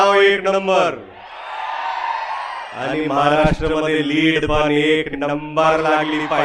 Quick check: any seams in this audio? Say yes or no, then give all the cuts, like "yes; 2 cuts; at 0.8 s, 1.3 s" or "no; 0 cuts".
no; 0 cuts